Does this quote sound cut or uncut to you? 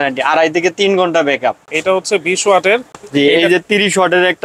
cut